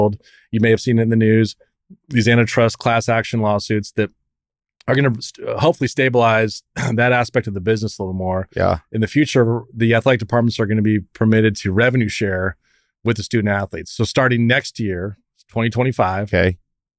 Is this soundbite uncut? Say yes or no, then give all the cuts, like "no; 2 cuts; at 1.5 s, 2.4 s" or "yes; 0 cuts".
yes; 0 cuts